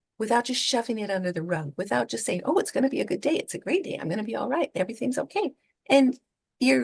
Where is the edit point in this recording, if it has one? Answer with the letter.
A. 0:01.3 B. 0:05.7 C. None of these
C